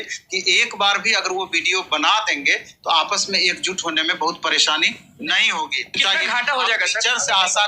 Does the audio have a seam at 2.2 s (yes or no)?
no